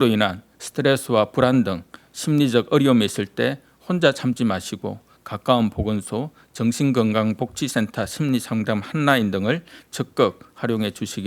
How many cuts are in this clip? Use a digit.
0